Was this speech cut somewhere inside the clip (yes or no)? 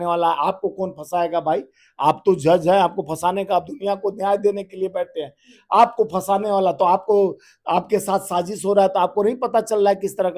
no